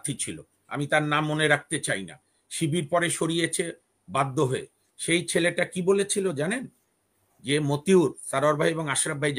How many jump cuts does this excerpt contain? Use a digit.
0